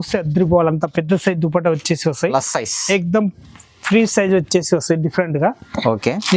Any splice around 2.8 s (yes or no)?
no